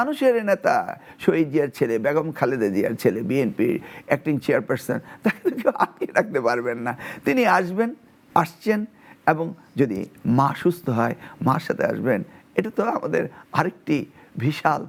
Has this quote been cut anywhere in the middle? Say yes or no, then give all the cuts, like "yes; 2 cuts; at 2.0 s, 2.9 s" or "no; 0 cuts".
no; 0 cuts